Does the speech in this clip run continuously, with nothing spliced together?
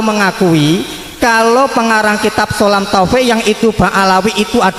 yes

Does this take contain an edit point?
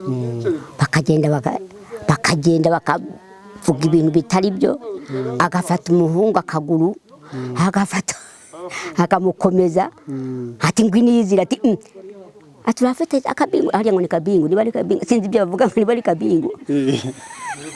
no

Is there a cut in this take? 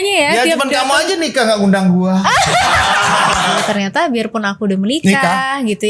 yes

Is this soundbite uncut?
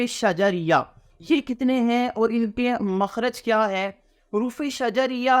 yes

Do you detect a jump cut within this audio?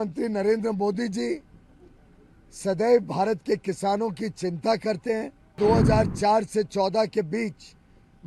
yes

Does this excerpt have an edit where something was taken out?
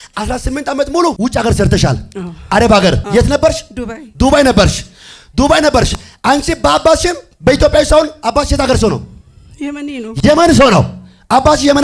yes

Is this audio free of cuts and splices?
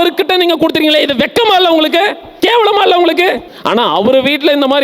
no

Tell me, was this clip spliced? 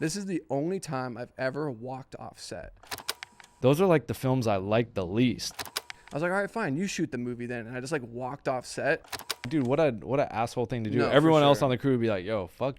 yes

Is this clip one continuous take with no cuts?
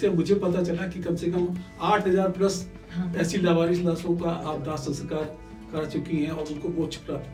yes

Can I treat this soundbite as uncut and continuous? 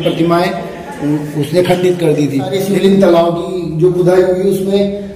no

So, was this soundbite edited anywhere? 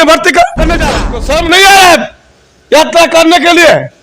yes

